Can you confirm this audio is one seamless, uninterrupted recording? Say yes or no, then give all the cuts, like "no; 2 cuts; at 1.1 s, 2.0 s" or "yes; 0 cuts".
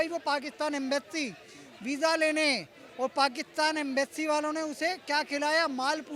yes; 0 cuts